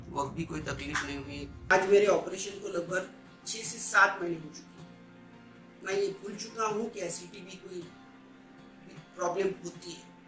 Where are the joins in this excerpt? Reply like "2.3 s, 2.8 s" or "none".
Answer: 1.7 s